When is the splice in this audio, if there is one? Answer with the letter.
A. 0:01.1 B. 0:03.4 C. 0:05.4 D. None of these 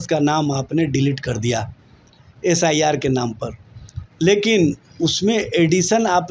D